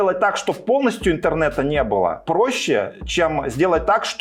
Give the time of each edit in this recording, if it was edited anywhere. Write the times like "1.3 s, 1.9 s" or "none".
none